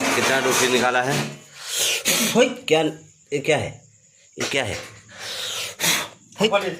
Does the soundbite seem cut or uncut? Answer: uncut